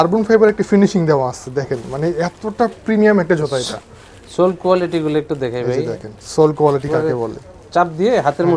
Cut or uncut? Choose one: uncut